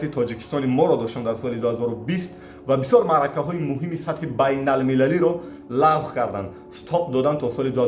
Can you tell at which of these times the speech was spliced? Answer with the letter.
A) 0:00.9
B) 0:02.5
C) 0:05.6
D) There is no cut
D